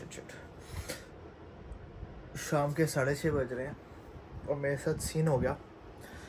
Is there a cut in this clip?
no; 0 cuts

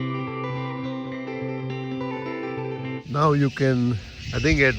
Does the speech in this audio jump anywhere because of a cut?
yes; 1 cut; at 3.0 s

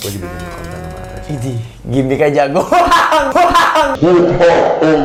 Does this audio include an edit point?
no; 0 cuts

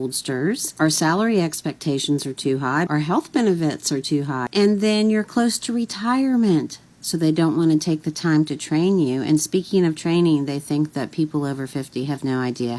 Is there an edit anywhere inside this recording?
yes; 2 cuts; at 2.9 s, 4.4 s

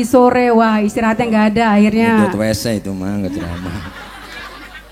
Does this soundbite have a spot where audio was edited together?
no; 0 cuts

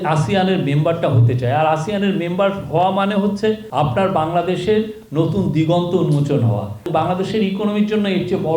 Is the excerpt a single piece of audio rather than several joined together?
no; 2 cuts; at 3.7 s, 6.8 s

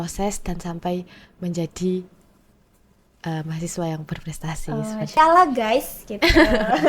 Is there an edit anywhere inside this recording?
yes; 1 cut; at 5.2 s

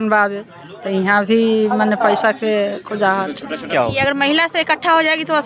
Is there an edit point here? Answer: yes; 1 cut; at 3.7 s

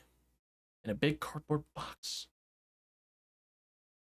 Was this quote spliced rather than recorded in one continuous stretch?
no; 0 cuts

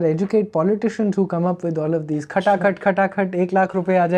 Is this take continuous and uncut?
yes; 0 cuts

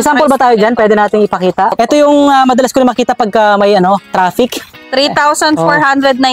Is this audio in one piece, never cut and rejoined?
no; 2 cuts; at 1.7 s, 4.7 s

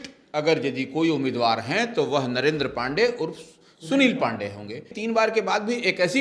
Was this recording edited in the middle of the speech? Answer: yes; 1 cut; at 5.0 s

